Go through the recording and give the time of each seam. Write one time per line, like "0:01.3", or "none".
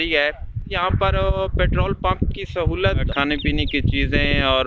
0:00.8
0:03.1

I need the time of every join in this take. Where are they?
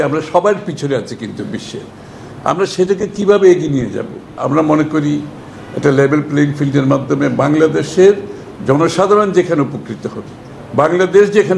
0:04.4

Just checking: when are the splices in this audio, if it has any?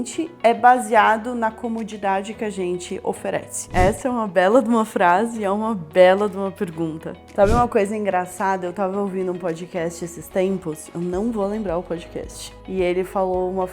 0:03.6
0:07.2

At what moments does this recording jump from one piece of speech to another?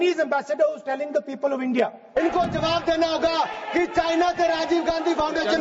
0:02.0

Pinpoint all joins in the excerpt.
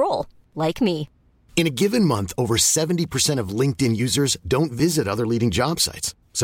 none

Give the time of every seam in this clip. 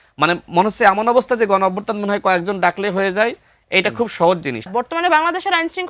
0:04.6

